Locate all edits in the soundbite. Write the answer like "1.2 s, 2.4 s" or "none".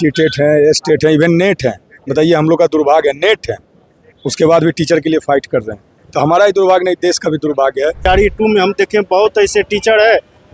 8.1 s